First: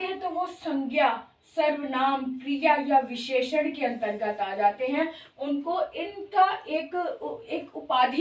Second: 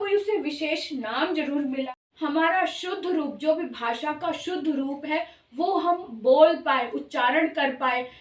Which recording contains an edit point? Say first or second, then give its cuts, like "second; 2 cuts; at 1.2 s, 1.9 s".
second; 1 cut; at 1.9 s